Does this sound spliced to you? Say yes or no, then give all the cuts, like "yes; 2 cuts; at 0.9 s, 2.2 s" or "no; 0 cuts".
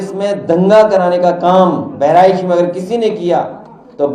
no; 0 cuts